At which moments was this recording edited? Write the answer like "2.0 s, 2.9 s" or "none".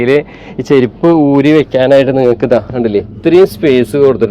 none